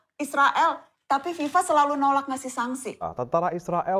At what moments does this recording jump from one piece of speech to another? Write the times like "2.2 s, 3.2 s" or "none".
2.9 s